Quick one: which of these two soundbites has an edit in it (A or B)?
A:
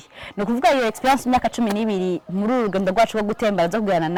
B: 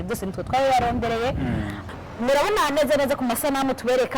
B